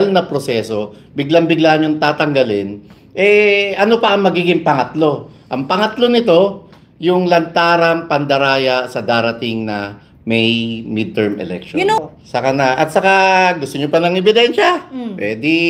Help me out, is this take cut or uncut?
cut